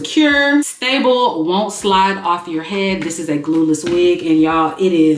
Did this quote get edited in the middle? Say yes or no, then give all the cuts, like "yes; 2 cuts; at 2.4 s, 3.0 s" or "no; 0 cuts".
no; 0 cuts